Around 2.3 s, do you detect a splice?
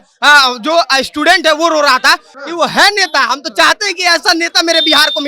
yes; 1 cut; at 2.3 s

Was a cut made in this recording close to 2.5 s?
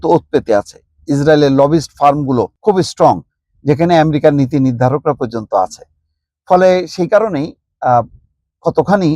yes; 1 cut; at 2.5 s

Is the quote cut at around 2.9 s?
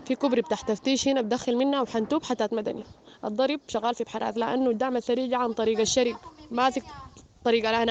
no; 0 cuts

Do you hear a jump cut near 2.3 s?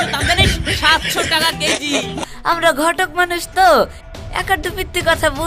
yes; 1 cut; at 2.3 s

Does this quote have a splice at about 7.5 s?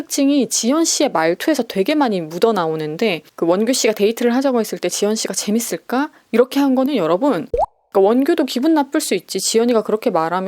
yes; 1 cut; at 7.5 s

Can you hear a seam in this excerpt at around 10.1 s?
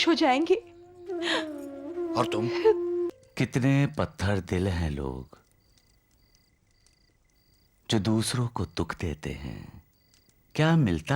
no; 1 cut; at 3.1 s

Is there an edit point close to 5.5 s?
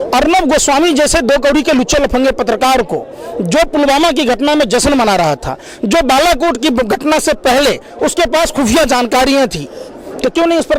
no; 0 cuts

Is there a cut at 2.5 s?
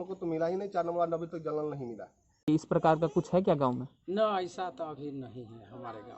yes; 1 cut; at 2.5 s

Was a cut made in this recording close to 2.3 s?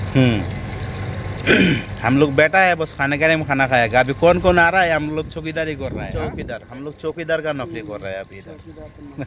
no; 1 cut; at 6.4 s

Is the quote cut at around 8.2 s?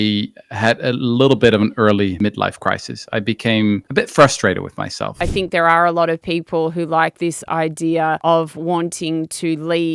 yes; 4 cuts; at 2.1 s, 3.9 s, 5.2 s, 8.2 s

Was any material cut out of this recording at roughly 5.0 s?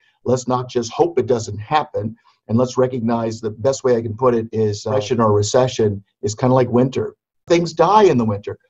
yes; 2 cuts; at 5.0 s, 7.5 s

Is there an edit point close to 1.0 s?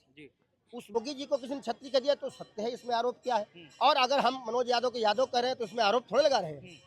yes; 1 cut; at 1.0 s

